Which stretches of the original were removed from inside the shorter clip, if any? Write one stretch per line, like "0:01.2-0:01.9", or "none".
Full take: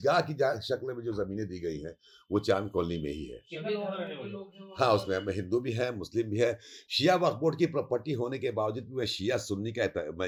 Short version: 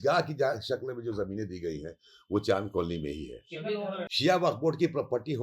0:04.1-0:06.9